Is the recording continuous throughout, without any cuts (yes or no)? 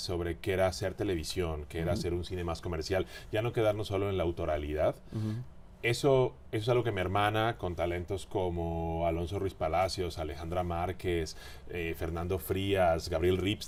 yes